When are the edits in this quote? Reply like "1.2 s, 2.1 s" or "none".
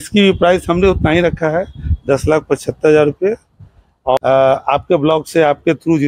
4.2 s